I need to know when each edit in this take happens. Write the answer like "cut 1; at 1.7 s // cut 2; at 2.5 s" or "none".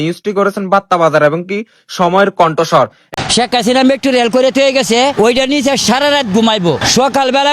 cut 1; at 3.0 s